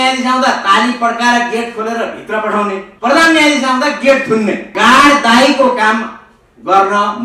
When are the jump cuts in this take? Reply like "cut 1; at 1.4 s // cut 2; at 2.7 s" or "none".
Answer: cut 1; at 2.9 s // cut 2; at 4.7 s